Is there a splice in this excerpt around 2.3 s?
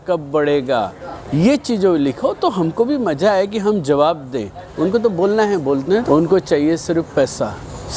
no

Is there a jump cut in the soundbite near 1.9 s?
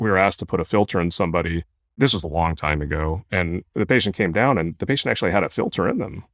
no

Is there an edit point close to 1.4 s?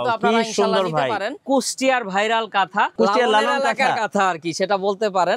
yes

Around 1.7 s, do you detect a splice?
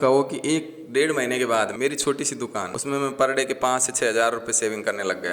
yes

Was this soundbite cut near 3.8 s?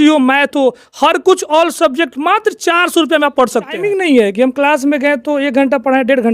yes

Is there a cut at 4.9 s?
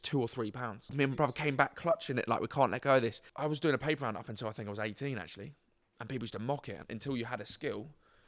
no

